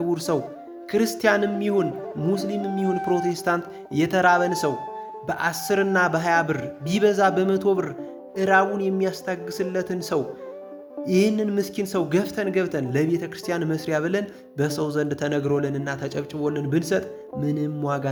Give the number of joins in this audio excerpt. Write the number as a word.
zero